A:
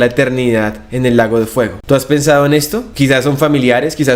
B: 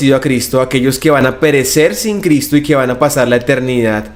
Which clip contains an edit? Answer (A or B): A